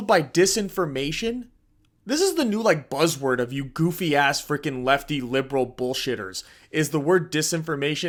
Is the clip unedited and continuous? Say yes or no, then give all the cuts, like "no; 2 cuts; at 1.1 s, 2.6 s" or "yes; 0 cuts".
yes; 0 cuts